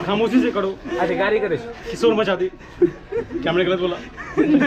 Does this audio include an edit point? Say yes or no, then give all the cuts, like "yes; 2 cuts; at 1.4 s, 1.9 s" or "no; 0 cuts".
no; 0 cuts